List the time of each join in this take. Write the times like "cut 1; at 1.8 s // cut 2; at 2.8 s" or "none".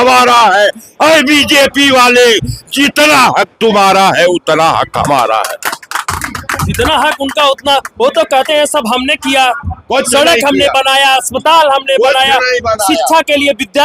none